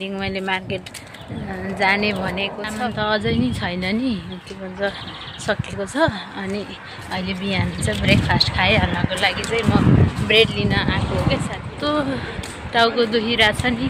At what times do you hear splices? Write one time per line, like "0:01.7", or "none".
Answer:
0:02.6
0:11.6